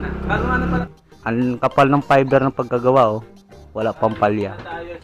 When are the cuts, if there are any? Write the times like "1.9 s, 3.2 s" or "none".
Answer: 0.9 s